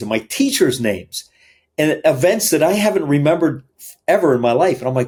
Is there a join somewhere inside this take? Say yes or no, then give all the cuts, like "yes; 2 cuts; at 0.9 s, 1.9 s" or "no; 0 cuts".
no; 0 cuts